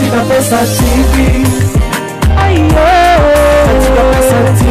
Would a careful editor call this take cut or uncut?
uncut